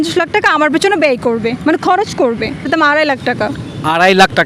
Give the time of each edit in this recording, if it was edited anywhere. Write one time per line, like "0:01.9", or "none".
0:02.7